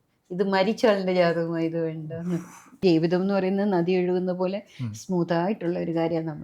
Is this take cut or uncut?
cut